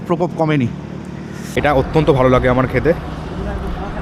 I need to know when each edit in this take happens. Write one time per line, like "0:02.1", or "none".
0:01.5